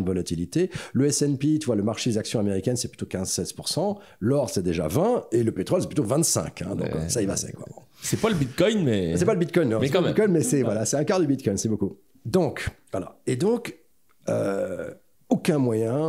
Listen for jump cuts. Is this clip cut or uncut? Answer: uncut